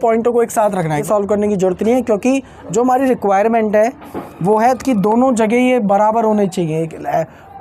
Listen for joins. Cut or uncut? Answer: cut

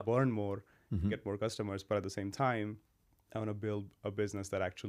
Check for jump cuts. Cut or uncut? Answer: uncut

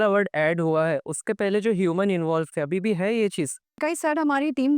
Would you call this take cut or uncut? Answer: cut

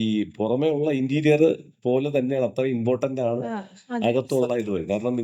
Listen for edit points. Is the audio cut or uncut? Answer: uncut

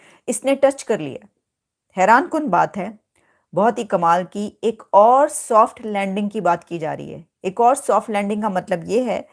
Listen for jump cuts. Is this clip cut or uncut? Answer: uncut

